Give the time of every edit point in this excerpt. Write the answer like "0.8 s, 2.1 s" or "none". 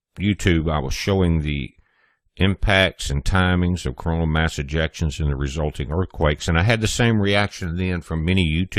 none